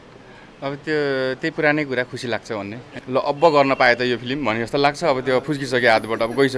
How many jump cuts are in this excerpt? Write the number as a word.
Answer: one